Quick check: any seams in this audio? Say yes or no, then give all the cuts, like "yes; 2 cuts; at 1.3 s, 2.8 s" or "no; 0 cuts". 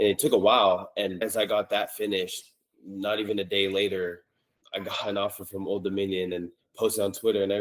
yes; 2 cuts; at 1.2 s, 4.5 s